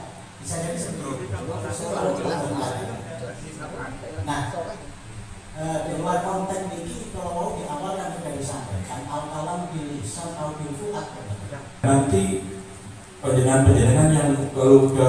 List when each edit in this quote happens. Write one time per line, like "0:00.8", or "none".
0:11.8